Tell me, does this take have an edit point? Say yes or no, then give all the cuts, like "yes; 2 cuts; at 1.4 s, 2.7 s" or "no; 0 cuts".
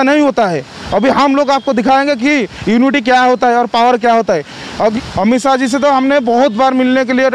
yes; 1 cut; at 4.9 s